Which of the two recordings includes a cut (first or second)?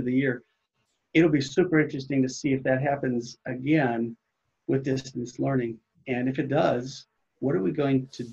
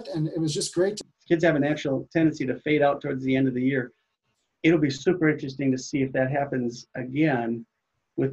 second